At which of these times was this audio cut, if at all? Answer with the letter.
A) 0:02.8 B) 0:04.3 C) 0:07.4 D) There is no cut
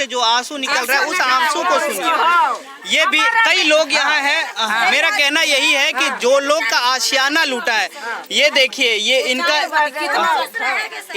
D